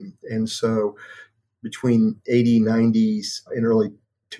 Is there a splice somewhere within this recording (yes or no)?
yes